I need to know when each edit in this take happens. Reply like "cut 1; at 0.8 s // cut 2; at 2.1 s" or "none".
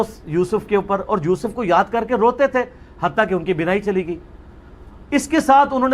cut 1; at 4.3 s